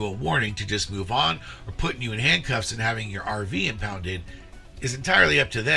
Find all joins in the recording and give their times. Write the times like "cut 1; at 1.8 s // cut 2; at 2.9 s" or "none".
none